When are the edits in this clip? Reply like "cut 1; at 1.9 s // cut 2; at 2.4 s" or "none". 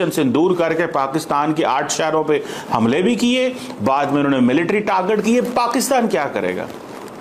none